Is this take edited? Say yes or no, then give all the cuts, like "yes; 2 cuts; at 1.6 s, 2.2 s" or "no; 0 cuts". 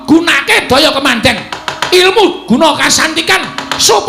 yes; 1 cut; at 1.1 s